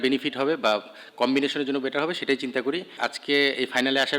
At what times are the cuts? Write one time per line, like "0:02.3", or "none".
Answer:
0:03.0